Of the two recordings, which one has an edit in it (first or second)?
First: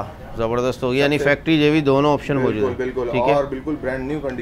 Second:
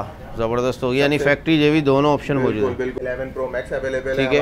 second